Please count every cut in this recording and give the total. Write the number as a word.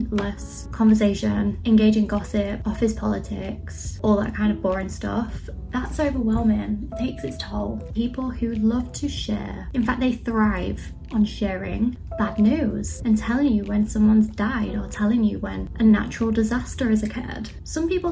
four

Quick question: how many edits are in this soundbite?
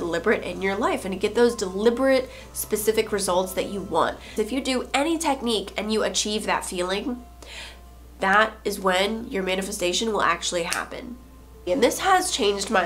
two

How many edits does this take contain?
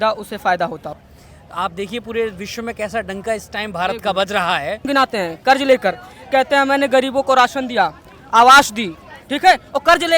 two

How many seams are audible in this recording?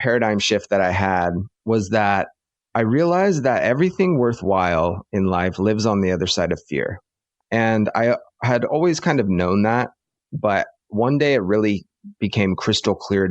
two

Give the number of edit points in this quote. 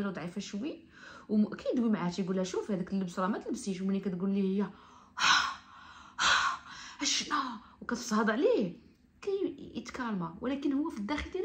zero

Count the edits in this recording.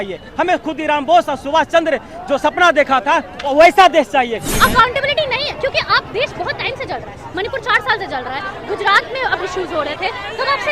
one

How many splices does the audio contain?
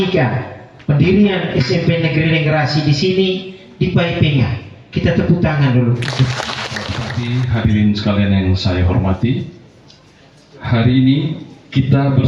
one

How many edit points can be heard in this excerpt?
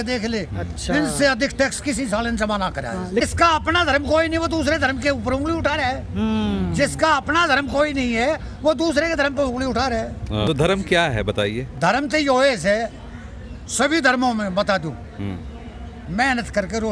two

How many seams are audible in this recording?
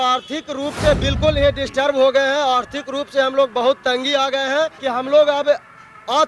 two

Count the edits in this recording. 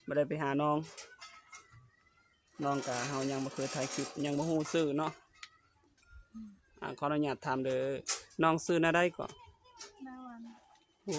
zero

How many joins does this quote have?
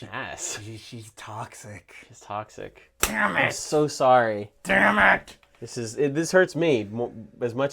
zero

